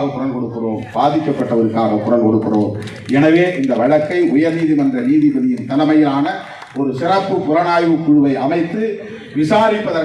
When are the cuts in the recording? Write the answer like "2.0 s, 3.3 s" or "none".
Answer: none

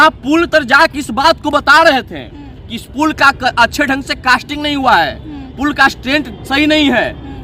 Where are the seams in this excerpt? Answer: none

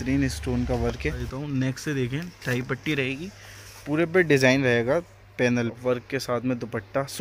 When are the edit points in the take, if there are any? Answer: 1.2 s, 5.8 s

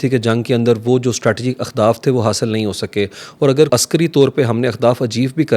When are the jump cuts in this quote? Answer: 3.7 s

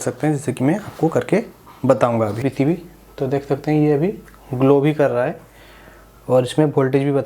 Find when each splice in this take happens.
2.4 s

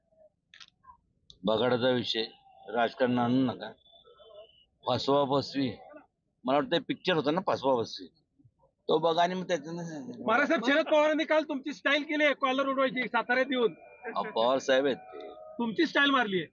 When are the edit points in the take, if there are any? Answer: none

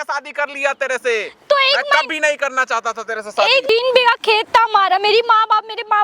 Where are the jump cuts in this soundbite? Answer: 3.6 s

